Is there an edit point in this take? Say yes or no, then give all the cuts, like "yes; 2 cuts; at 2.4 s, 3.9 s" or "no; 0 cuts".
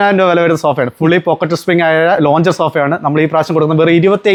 no; 0 cuts